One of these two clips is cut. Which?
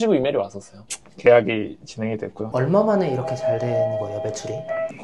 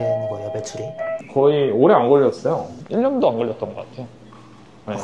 first; 2 cuts; at 1.1 s, 2.5 s

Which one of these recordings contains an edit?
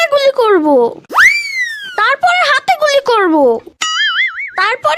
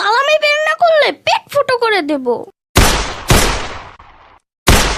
second; 1 cut; at 2.5 s

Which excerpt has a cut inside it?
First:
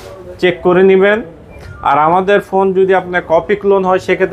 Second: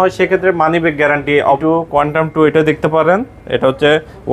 second; 1 cut; at 1.6 s

